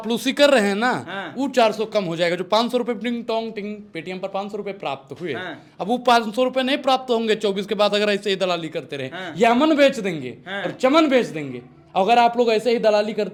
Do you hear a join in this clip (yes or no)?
no